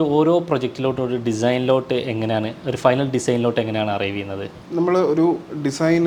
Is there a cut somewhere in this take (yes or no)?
no